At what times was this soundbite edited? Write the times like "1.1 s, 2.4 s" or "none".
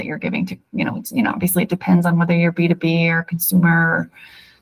none